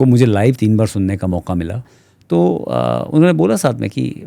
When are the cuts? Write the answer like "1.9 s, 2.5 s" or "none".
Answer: 1.9 s